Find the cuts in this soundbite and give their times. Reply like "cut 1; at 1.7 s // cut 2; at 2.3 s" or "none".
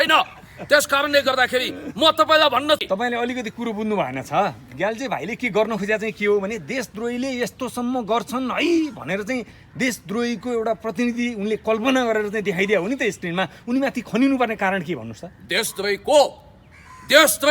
cut 1; at 2.8 s